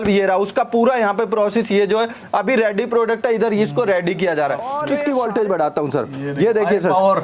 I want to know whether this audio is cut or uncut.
cut